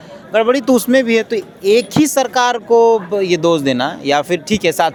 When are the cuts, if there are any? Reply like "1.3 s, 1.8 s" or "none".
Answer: none